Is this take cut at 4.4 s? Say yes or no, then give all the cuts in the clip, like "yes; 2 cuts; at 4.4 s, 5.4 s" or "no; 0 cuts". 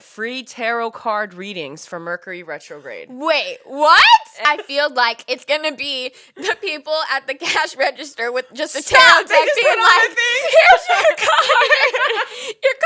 yes; 1 cut; at 4.4 s